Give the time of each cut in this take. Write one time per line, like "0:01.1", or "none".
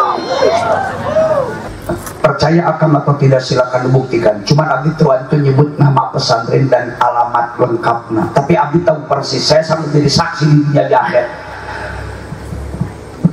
0:01.7